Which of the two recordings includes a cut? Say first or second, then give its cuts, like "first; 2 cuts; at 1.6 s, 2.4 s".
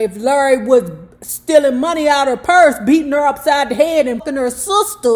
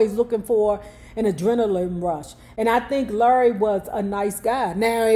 first; 1 cut; at 4.2 s